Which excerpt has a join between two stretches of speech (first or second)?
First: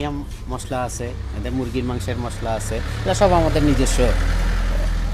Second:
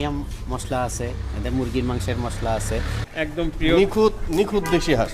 second